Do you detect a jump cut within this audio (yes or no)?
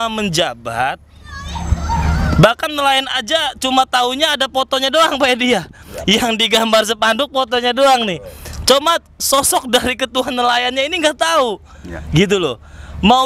no